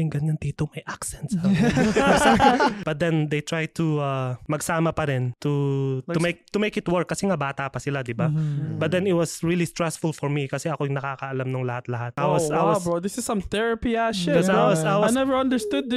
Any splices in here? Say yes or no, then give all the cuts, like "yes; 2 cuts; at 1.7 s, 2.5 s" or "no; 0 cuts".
yes; 4 cuts; at 2.8 s, 4.4 s, 5.3 s, 12.1 s